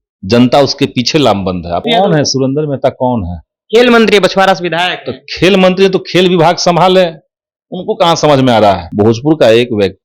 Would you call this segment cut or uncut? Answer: cut